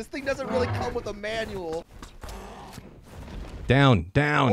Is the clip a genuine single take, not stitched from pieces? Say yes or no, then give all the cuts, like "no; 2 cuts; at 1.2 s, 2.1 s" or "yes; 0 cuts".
no; 1 cut; at 1.9 s